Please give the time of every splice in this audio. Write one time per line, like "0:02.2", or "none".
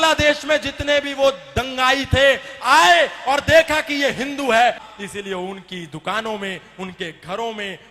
0:04.9